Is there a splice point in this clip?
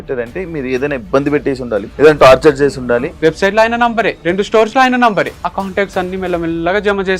yes; 4 cuts; at 1.9 s, 3.1 s, 4.2 s, 5.4 s

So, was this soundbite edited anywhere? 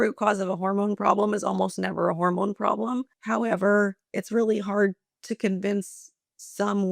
yes; 1 cut; at 3.1 s

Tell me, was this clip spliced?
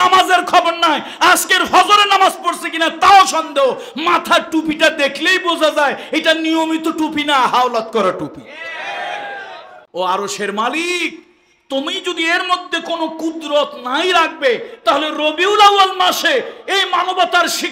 yes; 1 cut; at 9.7 s

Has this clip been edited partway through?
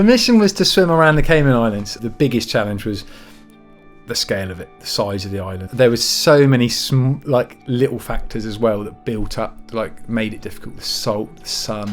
yes; 2 cuts; at 2.0 s, 5.6 s

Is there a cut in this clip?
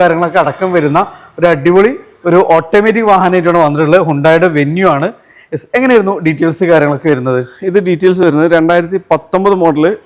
no; 0 cuts

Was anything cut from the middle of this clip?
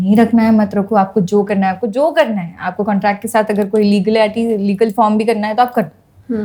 no; 0 cuts

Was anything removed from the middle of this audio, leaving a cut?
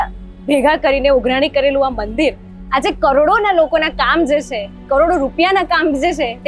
no; 0 cuts

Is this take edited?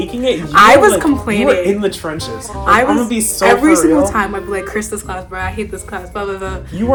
no; 0 cuts

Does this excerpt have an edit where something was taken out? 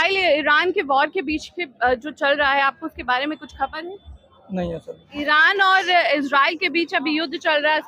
yes; 1 cut; at 5.1 s

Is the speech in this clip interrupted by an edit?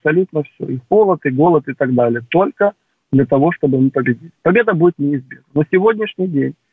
no; 0 cuts

